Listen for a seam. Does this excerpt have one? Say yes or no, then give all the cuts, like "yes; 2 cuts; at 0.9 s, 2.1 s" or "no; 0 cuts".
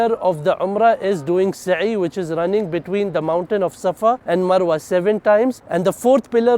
yes; 2 cuts; at 4.2 s, 5.6 s